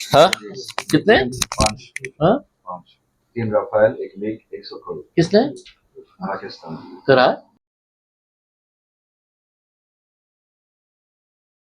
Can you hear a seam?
no; 0 cuts

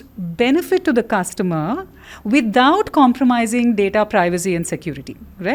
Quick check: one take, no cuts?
yes; 0 cuts

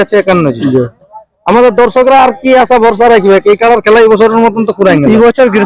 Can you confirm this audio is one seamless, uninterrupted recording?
yes; 0 cuts

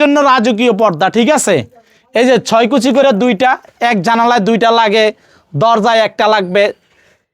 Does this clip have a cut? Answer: no; 0 cuts

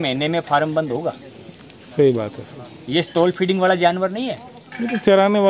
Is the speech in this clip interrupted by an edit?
no; 0 cuts

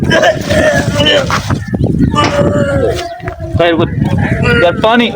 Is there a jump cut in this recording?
no; 0 cuts

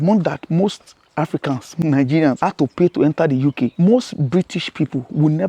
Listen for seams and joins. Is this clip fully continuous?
no; 3 cuts; at 1.7 s, 2.4 s, 3.7 s

